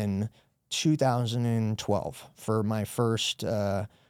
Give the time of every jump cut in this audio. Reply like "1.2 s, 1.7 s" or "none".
2.3 s